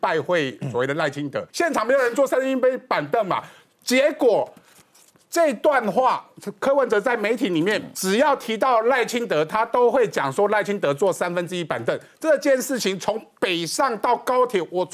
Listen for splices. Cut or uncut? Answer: cut